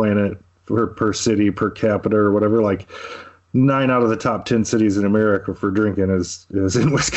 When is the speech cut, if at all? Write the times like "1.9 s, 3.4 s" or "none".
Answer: none